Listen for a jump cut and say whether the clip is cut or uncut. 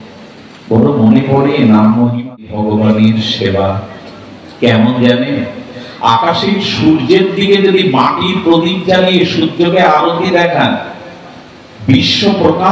cut